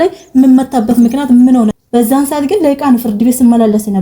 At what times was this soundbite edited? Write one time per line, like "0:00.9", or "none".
0:01.7